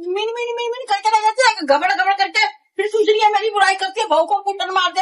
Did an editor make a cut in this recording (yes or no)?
no